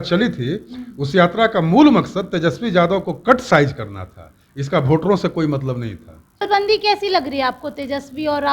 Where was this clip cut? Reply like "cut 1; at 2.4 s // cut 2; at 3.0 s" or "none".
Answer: cut 1; at 6.5 s